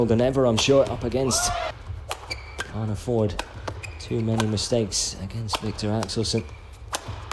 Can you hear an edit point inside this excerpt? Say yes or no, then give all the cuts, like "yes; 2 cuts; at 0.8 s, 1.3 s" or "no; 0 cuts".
yes; 1 cut; at 1.7 s